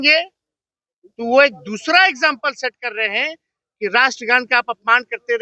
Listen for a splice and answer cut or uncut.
uncut